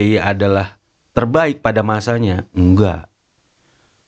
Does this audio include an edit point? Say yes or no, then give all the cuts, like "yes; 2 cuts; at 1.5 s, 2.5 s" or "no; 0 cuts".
no; 0 cuts